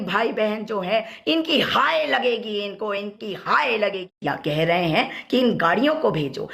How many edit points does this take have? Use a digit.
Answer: 1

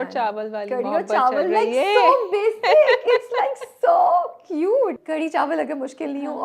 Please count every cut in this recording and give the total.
1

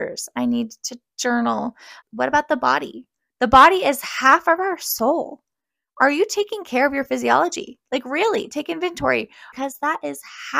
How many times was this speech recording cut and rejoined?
2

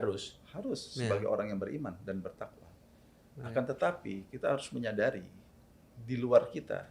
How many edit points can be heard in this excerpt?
0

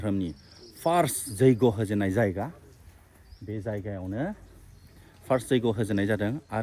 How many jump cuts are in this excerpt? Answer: 0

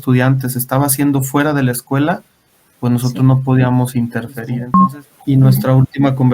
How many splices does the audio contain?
1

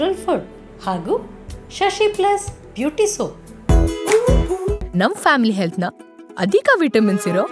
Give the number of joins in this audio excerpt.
1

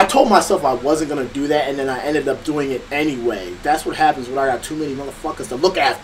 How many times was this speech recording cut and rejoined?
0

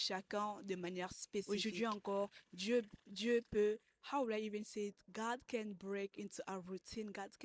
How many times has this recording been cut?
1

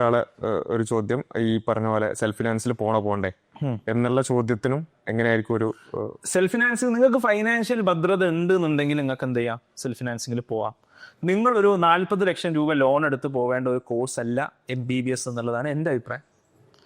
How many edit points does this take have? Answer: 0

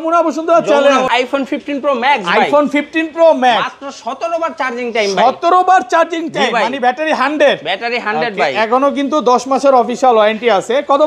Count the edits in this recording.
1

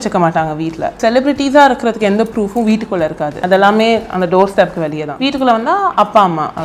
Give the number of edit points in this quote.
3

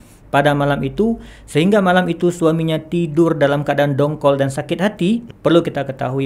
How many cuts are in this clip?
1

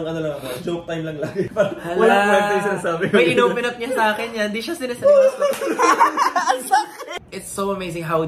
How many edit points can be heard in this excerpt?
1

